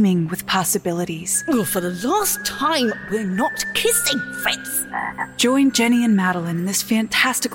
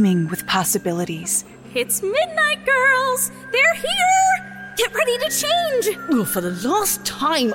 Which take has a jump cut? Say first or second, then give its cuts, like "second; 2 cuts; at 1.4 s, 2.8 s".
first; 2 cuts; at 1.4 s, 5.3 s